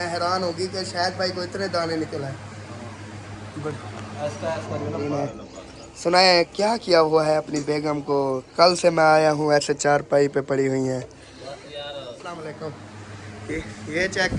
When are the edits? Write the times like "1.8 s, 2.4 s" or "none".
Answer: 5.1 s, 12.4 s